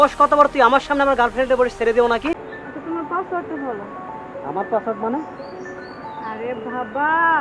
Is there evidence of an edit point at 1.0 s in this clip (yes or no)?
no